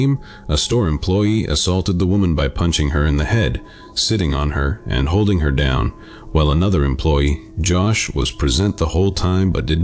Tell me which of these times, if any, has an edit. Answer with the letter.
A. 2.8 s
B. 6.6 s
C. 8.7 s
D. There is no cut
A